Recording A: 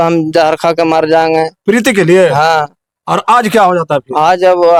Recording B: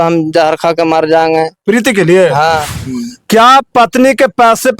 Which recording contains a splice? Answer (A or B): B